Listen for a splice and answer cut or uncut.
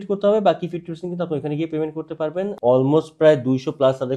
cut